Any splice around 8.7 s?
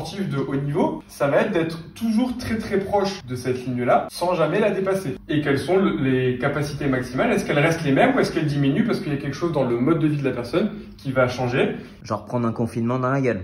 no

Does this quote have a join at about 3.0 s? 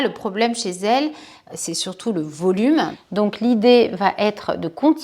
yes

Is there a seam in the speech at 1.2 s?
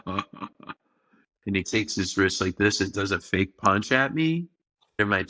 yes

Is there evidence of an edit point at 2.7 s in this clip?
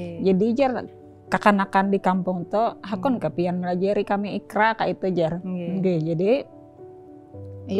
no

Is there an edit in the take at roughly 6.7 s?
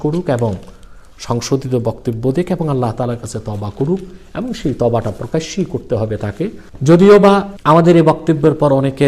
yes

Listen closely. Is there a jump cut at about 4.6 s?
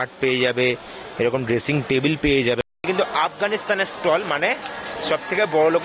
no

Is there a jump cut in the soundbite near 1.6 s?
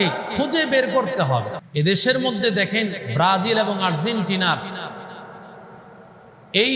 yes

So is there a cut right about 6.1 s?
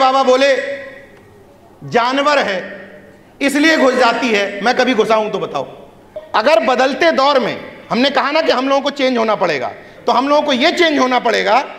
yes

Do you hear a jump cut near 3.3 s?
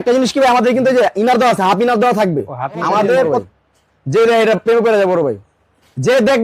yes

